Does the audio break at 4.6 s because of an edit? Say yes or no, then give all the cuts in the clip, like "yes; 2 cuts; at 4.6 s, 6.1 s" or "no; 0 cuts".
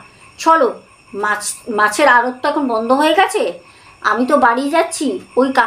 no; 0 cuts